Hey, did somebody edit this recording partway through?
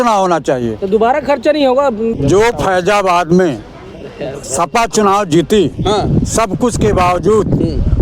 yes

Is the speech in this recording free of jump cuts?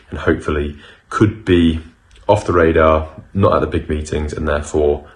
yes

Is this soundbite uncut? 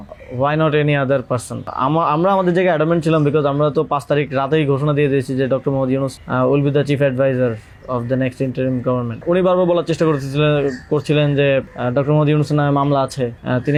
yes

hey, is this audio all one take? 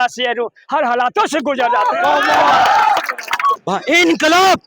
no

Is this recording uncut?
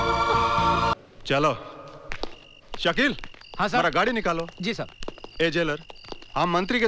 no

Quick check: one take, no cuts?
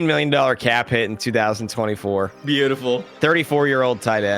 no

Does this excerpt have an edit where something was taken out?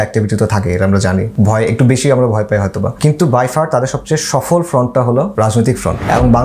yes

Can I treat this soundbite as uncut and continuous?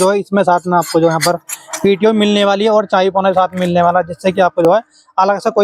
yes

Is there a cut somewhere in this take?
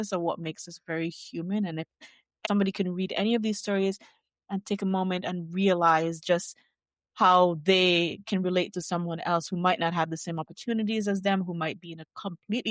yes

